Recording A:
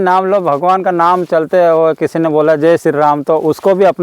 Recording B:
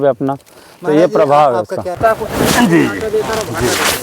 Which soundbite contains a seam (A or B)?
B